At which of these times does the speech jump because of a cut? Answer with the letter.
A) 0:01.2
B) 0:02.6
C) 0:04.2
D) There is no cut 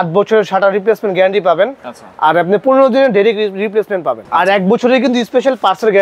C